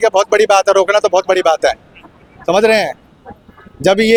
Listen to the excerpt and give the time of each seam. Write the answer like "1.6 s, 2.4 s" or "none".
none